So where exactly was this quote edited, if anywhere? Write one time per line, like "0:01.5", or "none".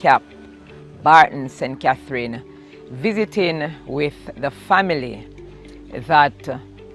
0:04.3